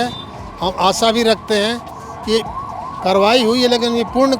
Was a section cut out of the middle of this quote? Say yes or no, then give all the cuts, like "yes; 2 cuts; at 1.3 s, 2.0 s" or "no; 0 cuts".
no; 0 cuts